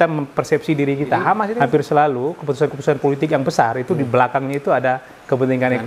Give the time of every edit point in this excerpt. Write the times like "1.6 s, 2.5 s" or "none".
1.5 s